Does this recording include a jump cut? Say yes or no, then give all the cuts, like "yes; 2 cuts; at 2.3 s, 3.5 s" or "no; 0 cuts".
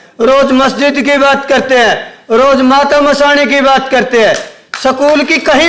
no; 0 cuts